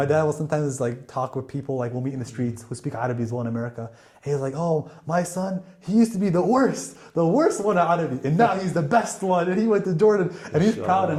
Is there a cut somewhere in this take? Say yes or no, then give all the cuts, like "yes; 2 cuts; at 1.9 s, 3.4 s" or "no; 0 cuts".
no; 0 cuts